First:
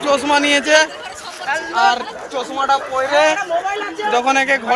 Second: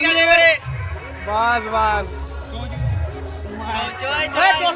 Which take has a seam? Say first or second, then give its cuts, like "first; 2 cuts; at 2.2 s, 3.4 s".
second; 1 cut; at 2.9 s